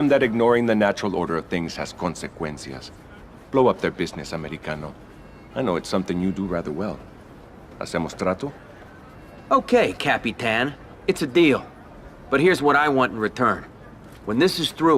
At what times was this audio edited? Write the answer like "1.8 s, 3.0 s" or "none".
2.3 s